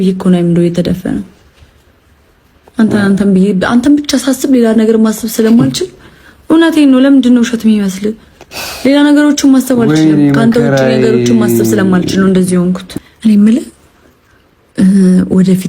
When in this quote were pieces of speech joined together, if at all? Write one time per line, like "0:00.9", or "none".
0:12.9